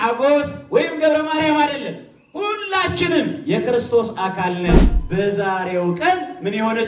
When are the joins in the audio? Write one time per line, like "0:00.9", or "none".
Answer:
0:04.9